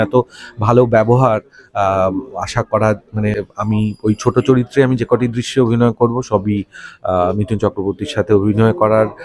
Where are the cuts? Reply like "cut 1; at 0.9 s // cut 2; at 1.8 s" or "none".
cut 1; at 3.5 s

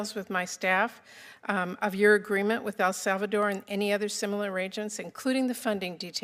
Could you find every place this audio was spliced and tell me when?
none

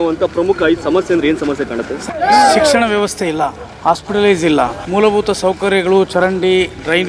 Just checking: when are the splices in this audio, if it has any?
cut 1; at 1.9 s // cut 2; at 3.7 s // cut 3; at 4.8 s

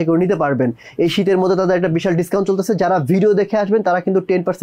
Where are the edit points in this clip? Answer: none

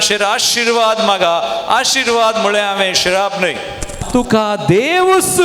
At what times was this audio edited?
cut 1; at 4.0 s

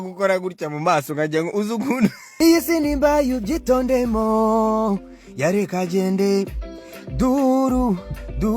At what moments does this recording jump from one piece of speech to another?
cut 1; at 2.4 s

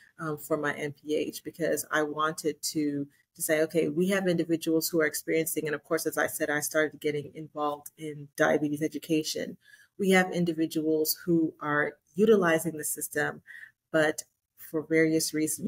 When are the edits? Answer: cut 1; at 8.2 s

